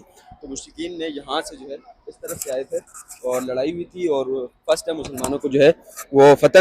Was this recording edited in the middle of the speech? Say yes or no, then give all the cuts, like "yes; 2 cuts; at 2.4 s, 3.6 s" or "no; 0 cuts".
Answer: no; 0 cuts